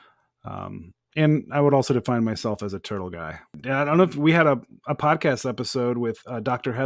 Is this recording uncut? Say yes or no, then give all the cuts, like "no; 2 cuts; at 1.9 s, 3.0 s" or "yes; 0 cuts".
no; 1 cut; at 3.6 s